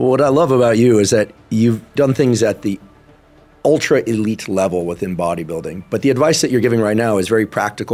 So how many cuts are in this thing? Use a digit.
0